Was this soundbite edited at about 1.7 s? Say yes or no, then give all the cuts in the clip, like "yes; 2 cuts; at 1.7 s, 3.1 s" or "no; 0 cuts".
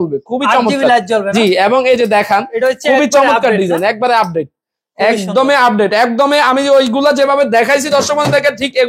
no; 0 cuts